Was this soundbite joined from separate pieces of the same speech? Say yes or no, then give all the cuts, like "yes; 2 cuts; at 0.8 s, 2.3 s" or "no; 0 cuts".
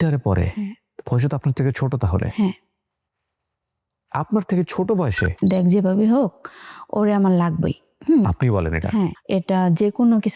yes; 2 cuts; at 5.4 s, 9.2 s